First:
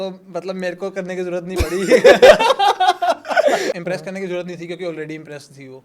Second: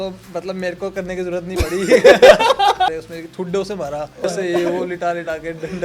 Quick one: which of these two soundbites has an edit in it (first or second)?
second